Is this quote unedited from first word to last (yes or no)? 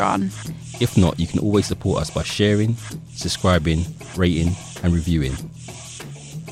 no